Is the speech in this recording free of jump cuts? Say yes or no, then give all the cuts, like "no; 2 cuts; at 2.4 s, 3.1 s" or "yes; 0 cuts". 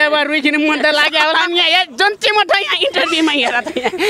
yes; 0 cuts